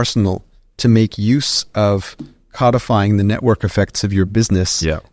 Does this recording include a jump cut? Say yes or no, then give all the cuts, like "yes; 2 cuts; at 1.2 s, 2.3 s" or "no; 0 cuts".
no; 0 cuts